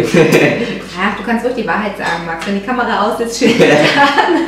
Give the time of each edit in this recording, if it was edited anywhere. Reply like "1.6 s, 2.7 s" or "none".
none